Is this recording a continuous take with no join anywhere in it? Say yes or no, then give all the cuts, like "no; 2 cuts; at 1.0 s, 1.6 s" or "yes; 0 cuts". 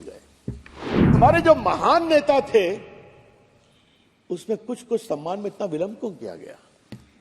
no; 1 cut; at 1.2 s